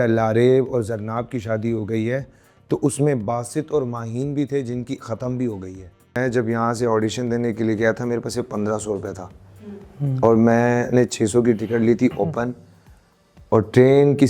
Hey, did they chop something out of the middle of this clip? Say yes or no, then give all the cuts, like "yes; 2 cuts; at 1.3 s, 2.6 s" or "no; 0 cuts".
yes; 1 cut; at 6.2 s